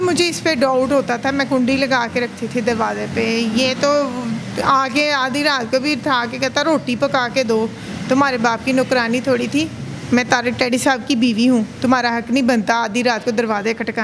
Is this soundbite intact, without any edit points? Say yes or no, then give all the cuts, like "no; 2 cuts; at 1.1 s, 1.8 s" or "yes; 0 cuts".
yes; 0 cuts